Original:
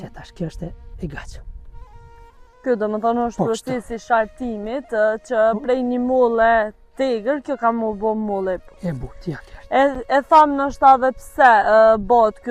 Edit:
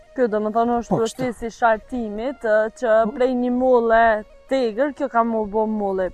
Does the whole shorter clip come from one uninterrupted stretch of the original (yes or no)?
yes